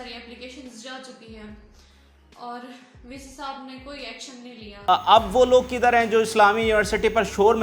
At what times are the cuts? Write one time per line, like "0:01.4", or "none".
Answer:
0:04.8